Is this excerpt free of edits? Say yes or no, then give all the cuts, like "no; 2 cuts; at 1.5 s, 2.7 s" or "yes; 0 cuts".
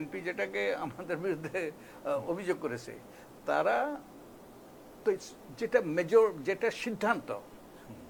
yes; 0 cuts